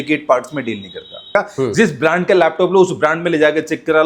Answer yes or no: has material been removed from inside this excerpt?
yes